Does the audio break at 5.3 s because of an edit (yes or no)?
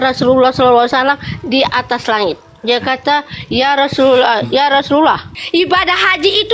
yes